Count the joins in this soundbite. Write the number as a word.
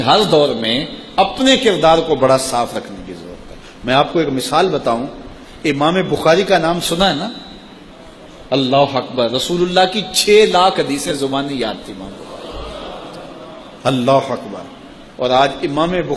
zero